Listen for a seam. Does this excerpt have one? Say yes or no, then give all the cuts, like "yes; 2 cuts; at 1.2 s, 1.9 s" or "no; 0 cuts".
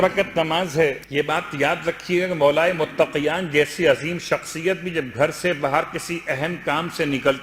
yes; 1 cut; at 1.0 s